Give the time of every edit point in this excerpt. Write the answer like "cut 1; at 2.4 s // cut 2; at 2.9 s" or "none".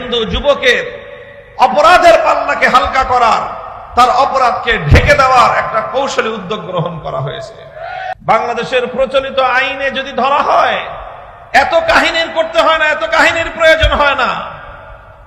cut 1; at 8.3 s